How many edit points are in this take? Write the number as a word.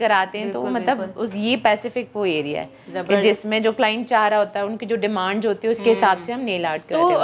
zero